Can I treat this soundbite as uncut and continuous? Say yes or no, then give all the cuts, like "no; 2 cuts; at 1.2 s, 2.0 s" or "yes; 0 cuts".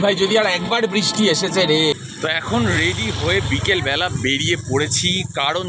yes; 0 cuts